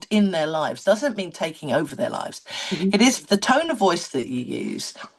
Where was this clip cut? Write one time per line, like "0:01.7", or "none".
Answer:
none